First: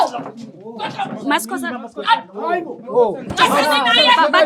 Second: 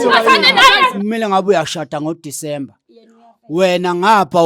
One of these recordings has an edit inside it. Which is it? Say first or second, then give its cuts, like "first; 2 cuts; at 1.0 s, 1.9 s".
second; 1 cut; at 1.0 s